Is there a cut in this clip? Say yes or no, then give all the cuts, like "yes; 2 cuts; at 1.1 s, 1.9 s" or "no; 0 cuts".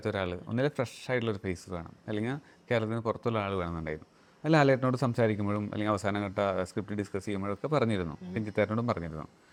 no; 0 cuts